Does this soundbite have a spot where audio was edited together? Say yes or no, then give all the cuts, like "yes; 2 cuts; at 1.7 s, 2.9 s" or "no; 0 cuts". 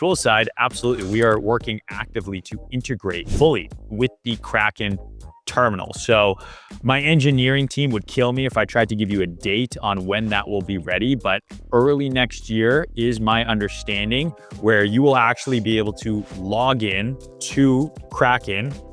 yes; 2 cuts; at 1.4 s, 3.3 s